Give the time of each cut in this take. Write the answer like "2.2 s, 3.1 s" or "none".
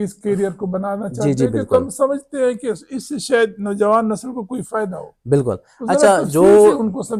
none